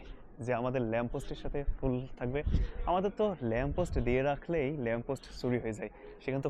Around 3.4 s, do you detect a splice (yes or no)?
no